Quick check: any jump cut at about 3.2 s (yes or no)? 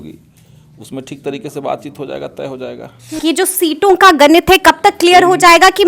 yes